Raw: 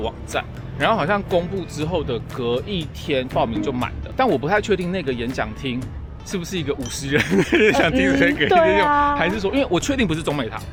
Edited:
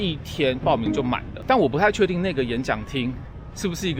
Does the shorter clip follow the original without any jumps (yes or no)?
yes